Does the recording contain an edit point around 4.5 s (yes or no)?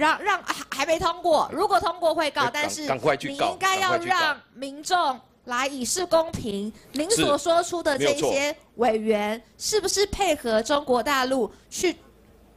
no